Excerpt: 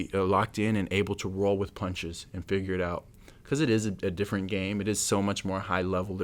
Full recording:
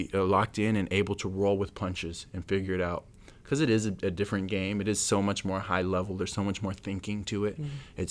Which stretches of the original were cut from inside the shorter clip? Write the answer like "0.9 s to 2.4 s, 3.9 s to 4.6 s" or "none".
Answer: none

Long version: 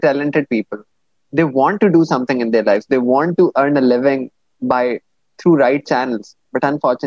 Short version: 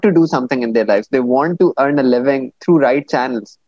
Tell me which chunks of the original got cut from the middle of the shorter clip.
4.3 s to 5.3 s

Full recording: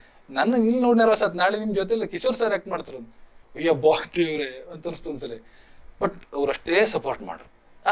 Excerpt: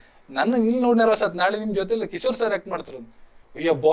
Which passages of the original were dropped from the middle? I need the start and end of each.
none

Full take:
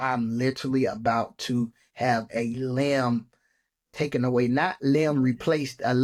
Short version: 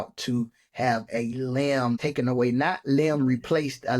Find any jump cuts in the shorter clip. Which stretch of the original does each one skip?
3.2 s to 4.0 s

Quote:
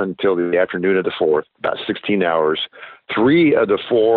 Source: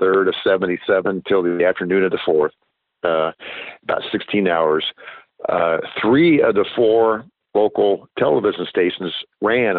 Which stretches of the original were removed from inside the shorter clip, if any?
2.6 s to 3.8 s, 5.3 s to 5.9 s

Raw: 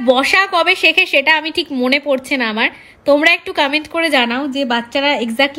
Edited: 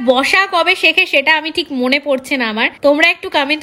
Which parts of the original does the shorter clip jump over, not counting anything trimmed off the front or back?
2.7 s to 2.9 s

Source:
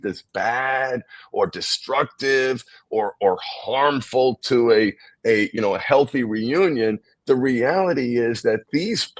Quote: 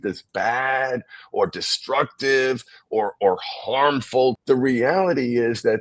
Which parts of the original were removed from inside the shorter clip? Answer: 4.4 s to 7.2 s

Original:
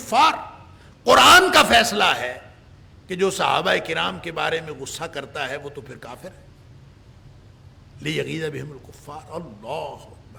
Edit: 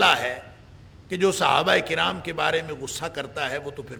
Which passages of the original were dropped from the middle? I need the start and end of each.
none

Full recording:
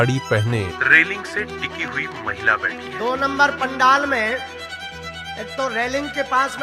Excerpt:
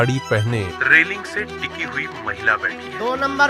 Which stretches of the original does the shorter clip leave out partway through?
none

